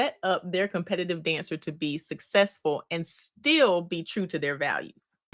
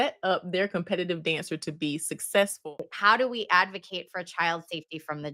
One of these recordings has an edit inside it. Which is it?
second; 1 cut; at 2.7 s

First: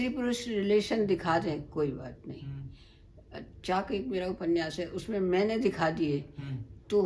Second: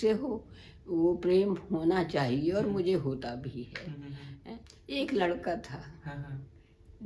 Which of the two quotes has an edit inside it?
second; 1 cut; at 4.7 s

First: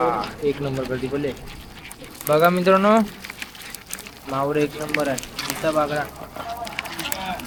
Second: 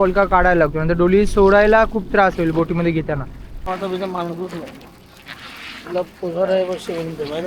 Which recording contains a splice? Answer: second; 1 cut; at 3.7 s

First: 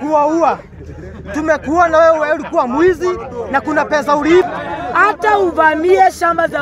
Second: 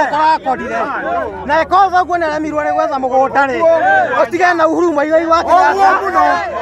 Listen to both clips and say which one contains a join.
first; 1 cut; at 4.5 s

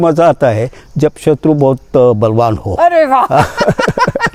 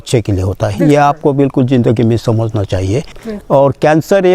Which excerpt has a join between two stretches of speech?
second; 1 cut; at 3.2 s

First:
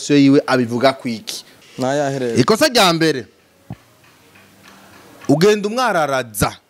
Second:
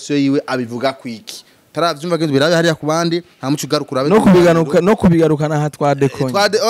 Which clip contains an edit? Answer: first; 1 cut; at 1.6 s

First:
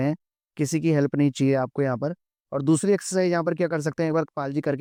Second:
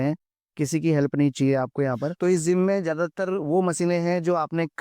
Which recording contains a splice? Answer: second; 1 cut; at 2.1 s

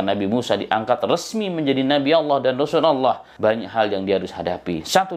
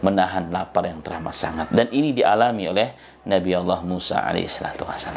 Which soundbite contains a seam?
first; 1 cut; at 3.3 s

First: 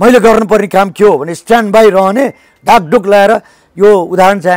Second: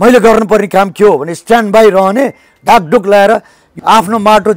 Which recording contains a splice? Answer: second; 1 cut; at 3.7 s

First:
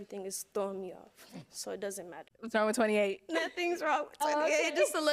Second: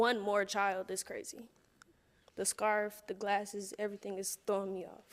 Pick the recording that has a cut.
first; 1 cut; at 2.3 s

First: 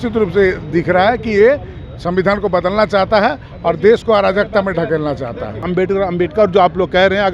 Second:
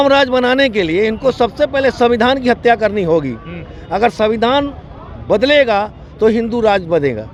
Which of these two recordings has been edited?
first; 1 cut; at 5.6 s

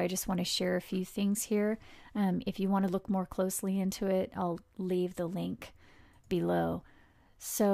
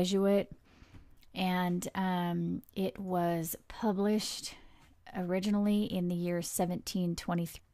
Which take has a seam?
first; 1 cut; at 1.1 s

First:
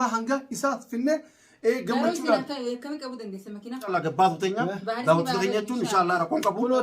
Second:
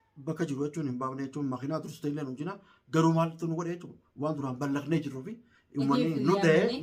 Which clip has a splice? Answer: first; 1 cut; at 3.9 s

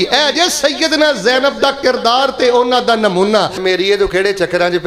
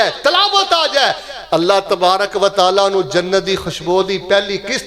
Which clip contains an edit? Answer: first; 1 cut; at 3.6 s

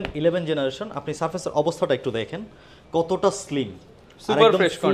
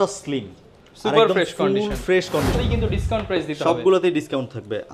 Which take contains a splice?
second; 1 cut; at 2.6 s

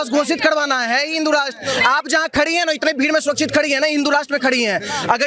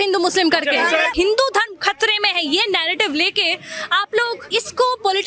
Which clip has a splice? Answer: second; 2 cuts; at 1.1 s, 4.4 s

